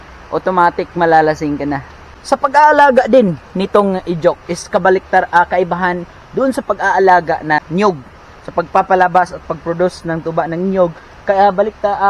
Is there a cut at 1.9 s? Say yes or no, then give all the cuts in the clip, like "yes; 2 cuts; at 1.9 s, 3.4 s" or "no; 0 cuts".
no; 0 cuts